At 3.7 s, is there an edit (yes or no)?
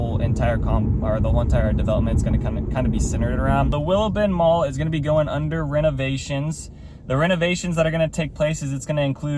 yes